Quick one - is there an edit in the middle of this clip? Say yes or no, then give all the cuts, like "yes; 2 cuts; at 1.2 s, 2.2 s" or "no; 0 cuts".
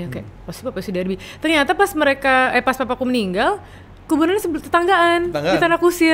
no; 0 cuts